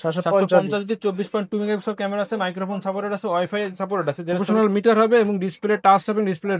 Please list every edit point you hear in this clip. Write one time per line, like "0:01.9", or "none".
0:04.4